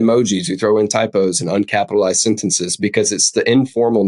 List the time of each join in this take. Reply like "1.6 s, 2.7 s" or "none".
none